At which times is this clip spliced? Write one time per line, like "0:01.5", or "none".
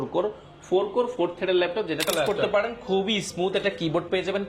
0:02.1